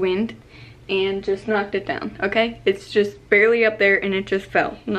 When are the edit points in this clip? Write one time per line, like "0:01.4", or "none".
none

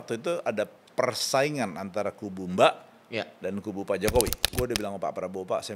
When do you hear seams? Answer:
0:04.4

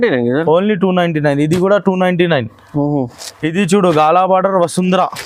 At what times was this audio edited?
none

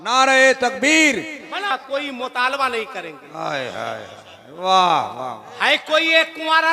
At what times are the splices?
0:01.6

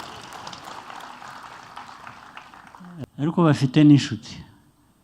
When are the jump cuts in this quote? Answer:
0:03.0

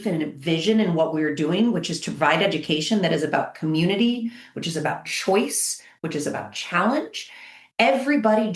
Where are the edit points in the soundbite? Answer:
none

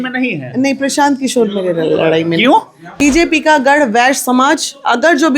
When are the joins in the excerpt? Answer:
0:02.8

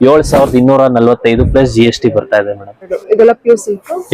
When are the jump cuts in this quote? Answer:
0:03.0

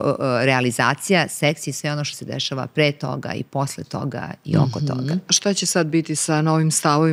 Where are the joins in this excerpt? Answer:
0:05.3
0:06.2

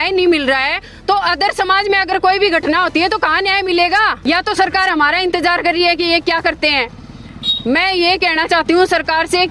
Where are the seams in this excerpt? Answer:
0:04.2

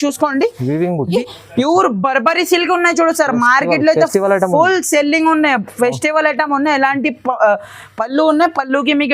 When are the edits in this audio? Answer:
0:01.2

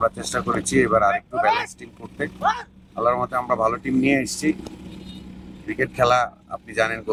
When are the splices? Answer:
none

